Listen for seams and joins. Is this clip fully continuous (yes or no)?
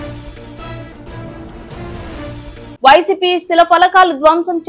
no